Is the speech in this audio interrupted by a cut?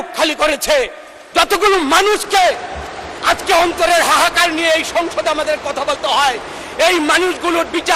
no; 0 cuts

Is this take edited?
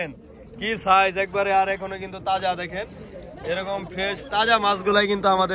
no; 0 cuts

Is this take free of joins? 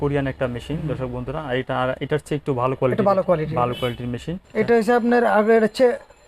no; 1 cut; at 4.3 s

